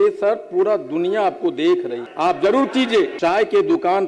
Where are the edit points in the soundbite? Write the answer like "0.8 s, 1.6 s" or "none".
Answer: 2.0 s, 3.1 s